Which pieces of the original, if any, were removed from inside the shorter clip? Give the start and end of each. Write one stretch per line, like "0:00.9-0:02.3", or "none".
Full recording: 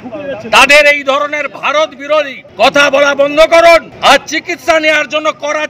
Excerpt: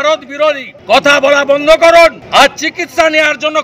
none

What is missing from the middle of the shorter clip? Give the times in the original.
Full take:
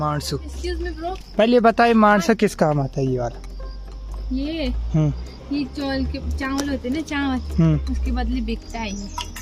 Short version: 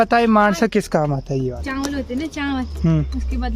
0:03.3-0:06.3

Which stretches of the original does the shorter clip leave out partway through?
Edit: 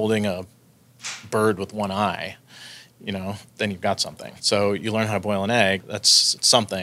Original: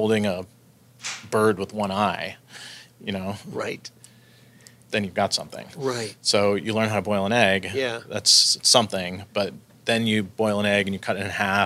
0:03.4-0:04.8
0:05.7-0:06.1
0:07.7-0:08.1

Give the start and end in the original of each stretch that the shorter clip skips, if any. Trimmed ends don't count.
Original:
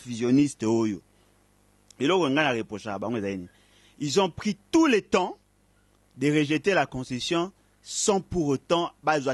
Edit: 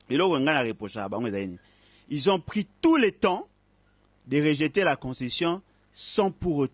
none

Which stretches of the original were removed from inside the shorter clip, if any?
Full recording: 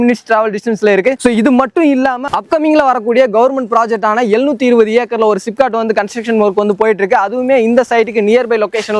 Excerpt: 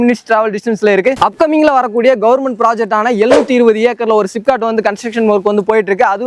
0:01.2-0:02.3

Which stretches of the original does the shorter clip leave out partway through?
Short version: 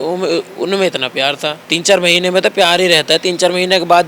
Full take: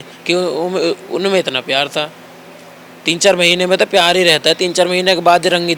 0:02.1-0:03.0

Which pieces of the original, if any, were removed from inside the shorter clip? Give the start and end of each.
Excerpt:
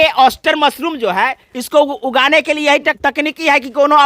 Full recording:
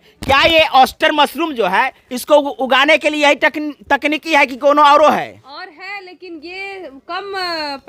0:03.5-0:03.8

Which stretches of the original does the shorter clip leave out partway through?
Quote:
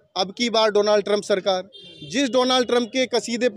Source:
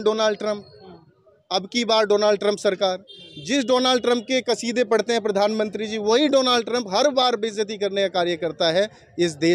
none

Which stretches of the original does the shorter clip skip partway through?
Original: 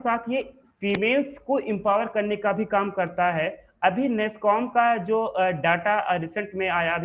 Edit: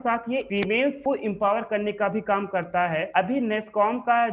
0:00.8-0:01.3
0:03.5-0:03.7

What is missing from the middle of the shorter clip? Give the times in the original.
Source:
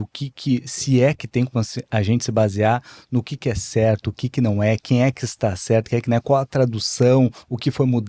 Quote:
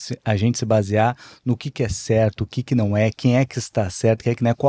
none

